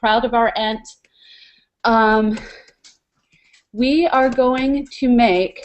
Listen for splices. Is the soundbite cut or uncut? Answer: uncut